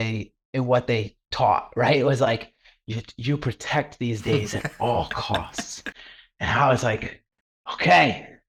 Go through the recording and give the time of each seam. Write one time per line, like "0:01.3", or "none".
none